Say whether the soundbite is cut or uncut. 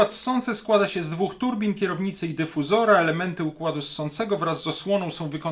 uncut